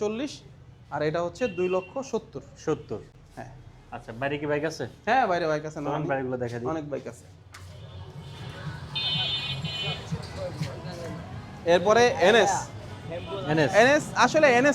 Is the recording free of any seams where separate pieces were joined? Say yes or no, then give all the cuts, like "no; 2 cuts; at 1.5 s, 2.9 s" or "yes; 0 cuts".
yes; 0 cuts